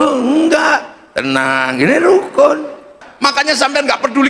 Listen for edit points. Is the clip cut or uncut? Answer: cut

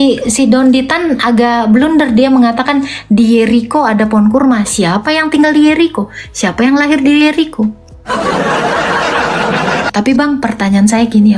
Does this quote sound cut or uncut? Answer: cut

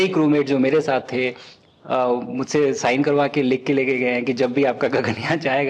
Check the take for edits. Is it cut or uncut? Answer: uncut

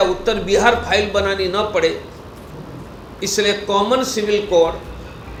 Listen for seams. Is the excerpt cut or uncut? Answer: uncut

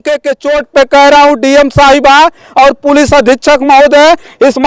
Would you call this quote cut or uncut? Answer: uncut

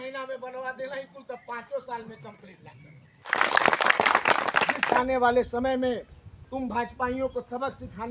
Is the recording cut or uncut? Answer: cut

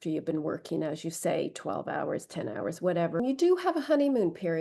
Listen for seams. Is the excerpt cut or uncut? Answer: cut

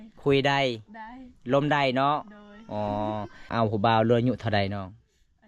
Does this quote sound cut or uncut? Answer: cut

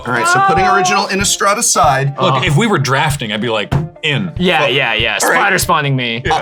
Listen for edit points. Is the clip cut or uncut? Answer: uncut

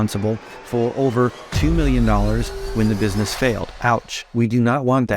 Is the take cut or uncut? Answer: cut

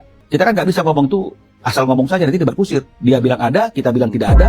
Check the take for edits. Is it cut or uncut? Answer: uncut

